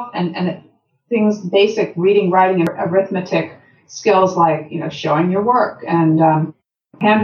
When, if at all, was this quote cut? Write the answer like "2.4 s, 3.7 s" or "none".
2.7 s